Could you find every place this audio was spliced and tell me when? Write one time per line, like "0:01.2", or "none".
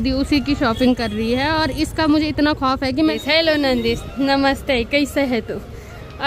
0:03.1